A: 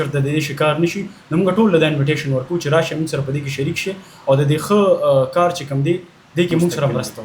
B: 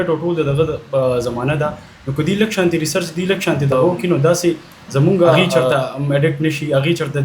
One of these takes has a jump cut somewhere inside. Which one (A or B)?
B